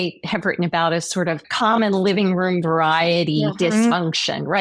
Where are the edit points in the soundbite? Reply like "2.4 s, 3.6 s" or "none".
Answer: 1.5 s